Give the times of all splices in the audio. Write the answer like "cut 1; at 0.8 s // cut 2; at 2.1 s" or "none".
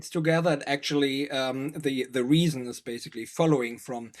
none